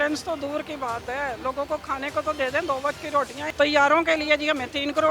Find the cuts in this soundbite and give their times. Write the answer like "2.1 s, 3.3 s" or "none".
3.4 s